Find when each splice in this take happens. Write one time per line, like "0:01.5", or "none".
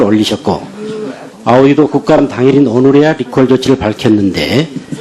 0:03.6